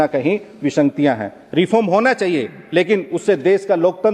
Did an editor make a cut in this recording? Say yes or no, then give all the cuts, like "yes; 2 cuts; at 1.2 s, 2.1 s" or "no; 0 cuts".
no; 0 cuts